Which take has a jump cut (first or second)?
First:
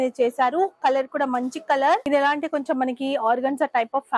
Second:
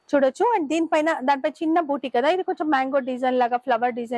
first